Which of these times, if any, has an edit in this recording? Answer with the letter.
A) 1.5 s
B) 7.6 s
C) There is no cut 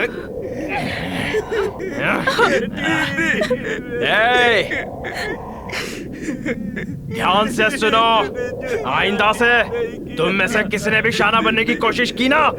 C